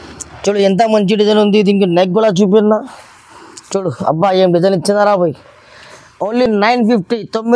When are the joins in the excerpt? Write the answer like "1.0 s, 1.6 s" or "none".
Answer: none